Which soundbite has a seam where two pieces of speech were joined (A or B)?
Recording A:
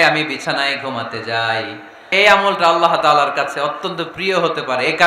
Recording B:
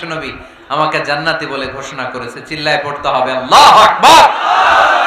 A